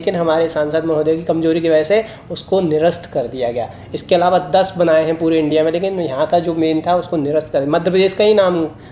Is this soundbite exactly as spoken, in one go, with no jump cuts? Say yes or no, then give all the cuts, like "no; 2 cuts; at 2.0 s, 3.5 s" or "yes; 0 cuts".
yes; 0 cuts